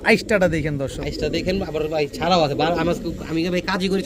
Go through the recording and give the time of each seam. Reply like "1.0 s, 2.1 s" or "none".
none